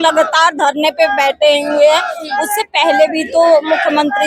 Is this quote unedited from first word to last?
yes; 0 cuts

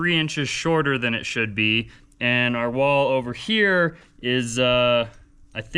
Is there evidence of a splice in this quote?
no; 0 cuts

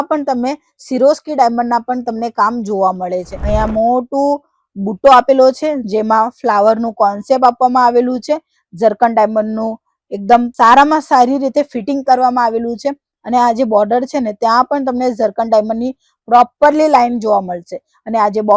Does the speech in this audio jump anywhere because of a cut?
yes; 1 cut; at 3.3 s

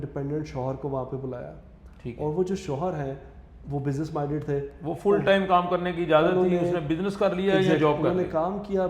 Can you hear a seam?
no; 0 cuts

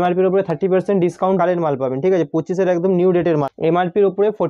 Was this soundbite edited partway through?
yes; 2 cuts; at 1.4 s, 3.5 s

